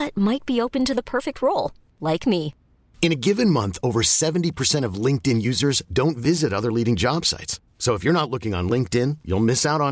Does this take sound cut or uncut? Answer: uncut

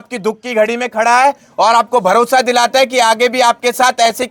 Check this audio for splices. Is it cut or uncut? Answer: uncut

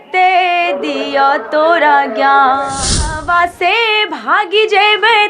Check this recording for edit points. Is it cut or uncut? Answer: cut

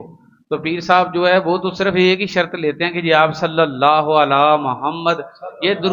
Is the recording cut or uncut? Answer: uncut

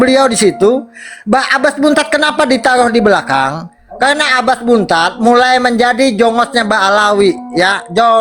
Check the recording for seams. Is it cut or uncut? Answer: uncut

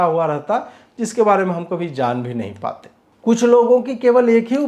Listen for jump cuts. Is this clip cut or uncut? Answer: cut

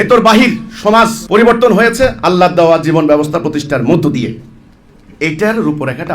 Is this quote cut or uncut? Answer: uncut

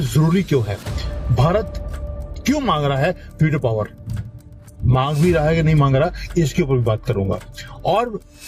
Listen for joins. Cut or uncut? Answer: uncut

